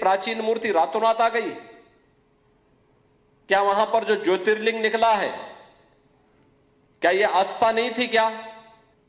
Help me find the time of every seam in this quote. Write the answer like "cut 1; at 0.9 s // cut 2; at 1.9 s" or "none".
none